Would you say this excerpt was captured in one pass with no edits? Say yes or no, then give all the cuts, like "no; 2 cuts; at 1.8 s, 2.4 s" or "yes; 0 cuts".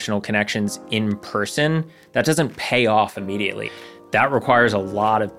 no; 1 cut; at 3.6 s